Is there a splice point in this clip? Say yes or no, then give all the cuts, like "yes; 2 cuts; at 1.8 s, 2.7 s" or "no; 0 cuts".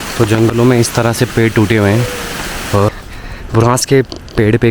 yes; 1 cut; at 2.9 s